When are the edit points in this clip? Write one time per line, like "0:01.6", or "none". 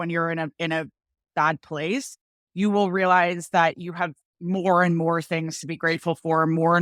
none